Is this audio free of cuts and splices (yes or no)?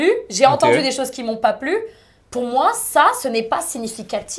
yes